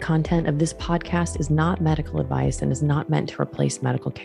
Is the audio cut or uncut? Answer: uncut